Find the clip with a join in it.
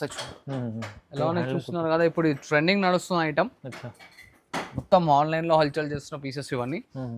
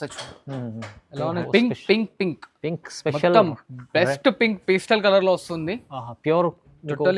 second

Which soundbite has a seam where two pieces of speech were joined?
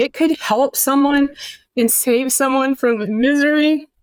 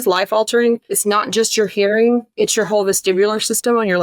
second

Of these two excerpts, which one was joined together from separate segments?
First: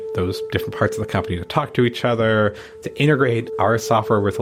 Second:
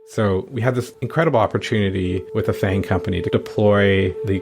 second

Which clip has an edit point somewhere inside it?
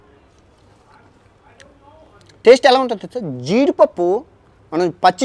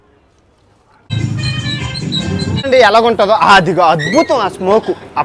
second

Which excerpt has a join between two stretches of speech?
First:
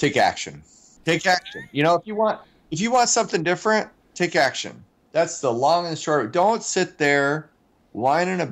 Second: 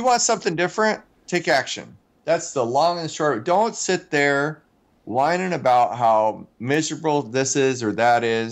first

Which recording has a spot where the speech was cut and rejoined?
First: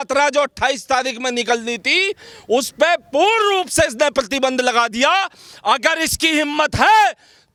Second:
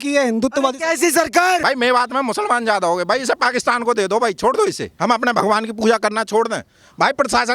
second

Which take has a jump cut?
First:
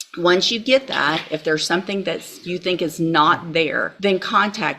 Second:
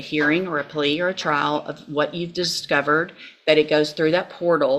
first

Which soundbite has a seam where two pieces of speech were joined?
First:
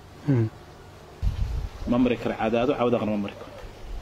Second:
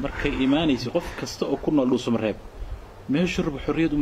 first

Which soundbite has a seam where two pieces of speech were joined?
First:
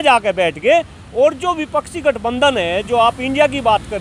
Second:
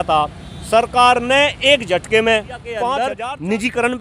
second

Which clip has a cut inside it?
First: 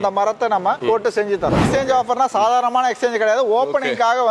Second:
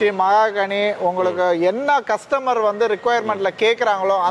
first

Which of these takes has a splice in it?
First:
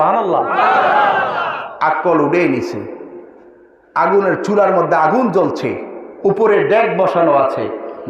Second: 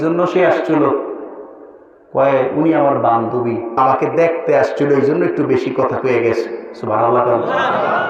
second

